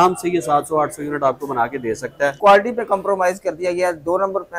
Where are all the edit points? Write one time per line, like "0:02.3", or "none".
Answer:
0:02.4